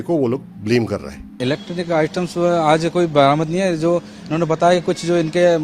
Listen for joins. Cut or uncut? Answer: cut